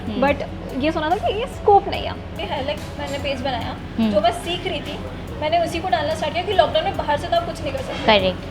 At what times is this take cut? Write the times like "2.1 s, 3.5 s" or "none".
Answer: 2.5 s